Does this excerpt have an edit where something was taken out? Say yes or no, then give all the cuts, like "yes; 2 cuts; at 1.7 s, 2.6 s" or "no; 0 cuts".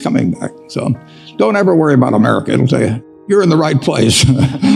yes; 1 cut; at 3.2 s